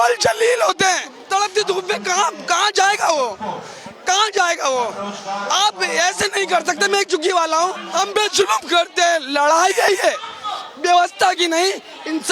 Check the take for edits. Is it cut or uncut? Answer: cut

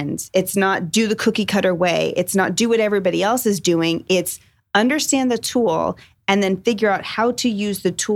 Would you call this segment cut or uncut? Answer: uncut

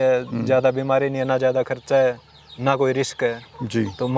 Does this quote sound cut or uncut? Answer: uncut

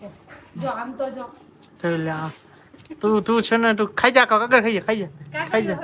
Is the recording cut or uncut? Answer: uncut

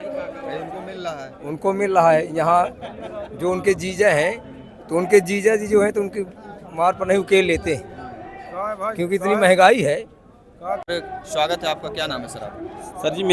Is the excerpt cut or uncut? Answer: uncut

